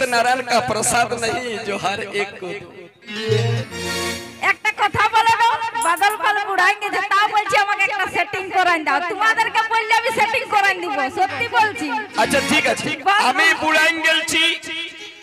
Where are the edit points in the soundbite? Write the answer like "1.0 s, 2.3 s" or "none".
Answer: 3.6 s, 12.9 s

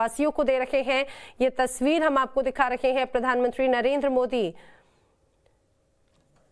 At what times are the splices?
1.2 s

